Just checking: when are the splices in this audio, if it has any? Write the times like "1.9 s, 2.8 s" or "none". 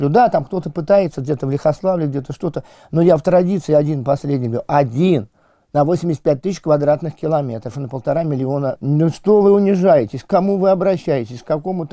8.8 s